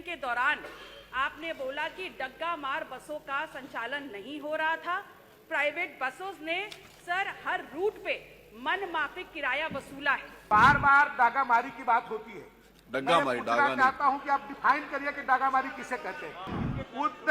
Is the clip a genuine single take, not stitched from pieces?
no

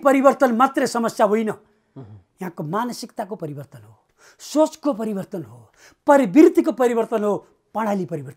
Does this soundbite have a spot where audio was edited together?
no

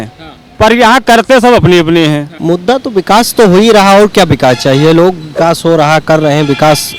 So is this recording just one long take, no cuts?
no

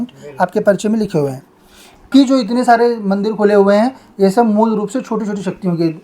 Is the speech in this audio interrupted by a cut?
yes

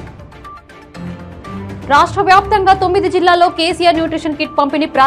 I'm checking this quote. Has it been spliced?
no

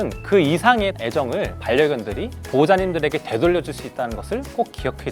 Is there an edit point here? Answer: no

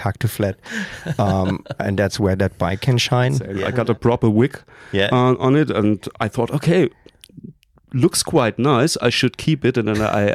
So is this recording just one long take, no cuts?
no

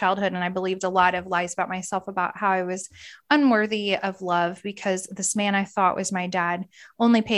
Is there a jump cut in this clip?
no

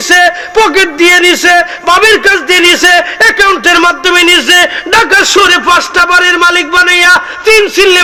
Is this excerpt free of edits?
yes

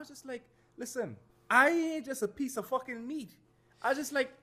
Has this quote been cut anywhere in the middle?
yes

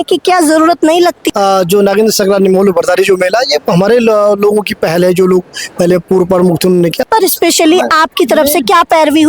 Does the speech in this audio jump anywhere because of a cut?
yes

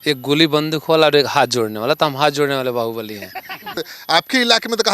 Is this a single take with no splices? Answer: no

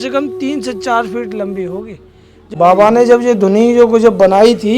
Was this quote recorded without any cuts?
no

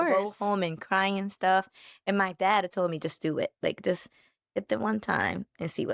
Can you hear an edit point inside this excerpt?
no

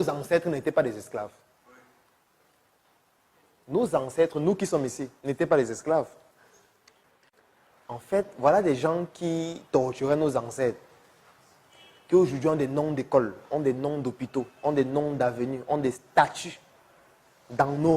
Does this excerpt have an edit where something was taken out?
yes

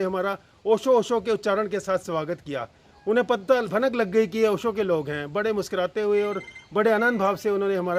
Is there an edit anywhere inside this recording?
no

